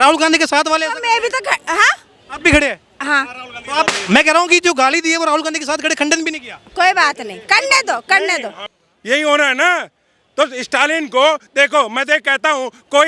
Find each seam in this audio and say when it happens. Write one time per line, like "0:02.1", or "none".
0:08.7